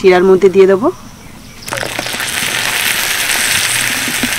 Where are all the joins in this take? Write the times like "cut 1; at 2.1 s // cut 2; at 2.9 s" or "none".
none